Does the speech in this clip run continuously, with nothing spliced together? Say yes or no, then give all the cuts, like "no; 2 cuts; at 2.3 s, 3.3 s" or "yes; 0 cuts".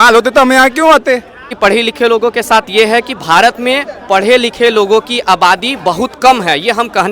no; 1 cut; at 1.5 s